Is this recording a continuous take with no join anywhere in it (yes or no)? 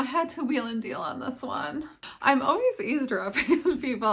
no